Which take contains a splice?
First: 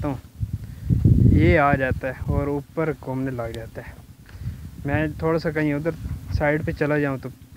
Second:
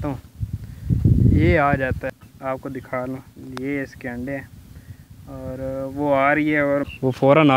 second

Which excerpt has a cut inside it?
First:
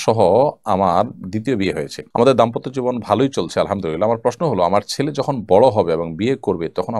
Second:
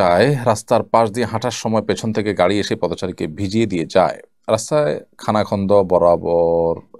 first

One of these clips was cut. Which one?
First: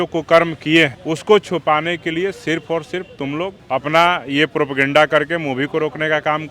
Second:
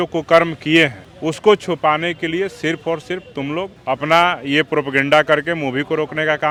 first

